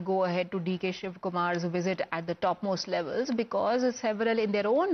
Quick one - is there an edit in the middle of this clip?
no; 0 cuts

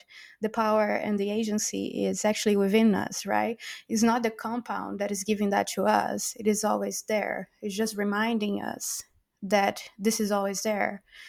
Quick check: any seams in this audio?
no; 0 cuts

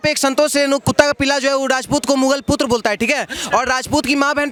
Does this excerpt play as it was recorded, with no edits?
yes; 0 cuts

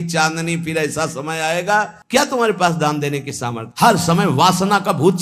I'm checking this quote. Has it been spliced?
yes; 1 cut; at 2.0 s

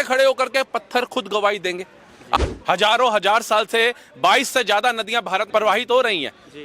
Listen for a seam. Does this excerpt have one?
yes; 2 cuts; at 2.4 s, 5.5 s

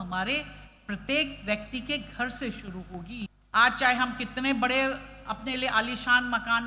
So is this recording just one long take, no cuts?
no; 1 cut; at 3.4 s

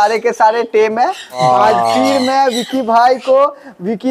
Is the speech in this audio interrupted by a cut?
yes; 1 cut; at 1.4 s

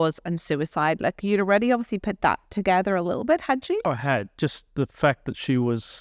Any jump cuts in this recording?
no; 0 cuts

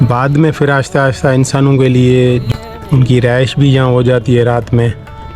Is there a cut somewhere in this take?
yes; 1 cut; at 2.5 s

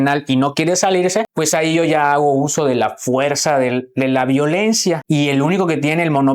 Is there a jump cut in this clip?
yes; 2 cuts; at 1.3 s, 5.0 s

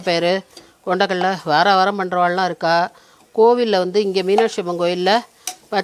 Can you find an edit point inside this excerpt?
no; 0 cuts

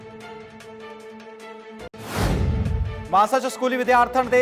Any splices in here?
yes; 1 cut; at 2.6 s

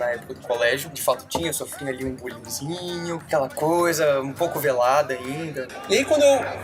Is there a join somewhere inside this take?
yes; 3 cuts; at 0.9 s, 3.2 s, 5.6 s

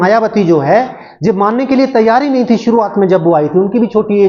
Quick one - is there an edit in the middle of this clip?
no; 0 cuts

